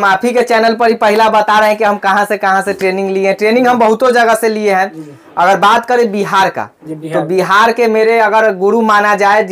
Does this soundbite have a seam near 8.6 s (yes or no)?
no